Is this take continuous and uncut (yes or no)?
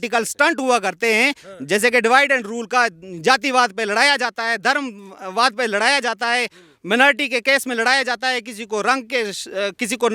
yes